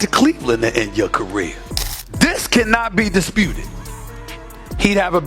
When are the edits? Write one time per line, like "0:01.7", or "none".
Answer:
0:01.8